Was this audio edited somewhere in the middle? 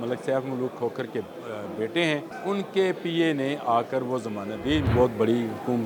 yes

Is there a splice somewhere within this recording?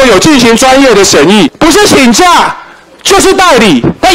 yes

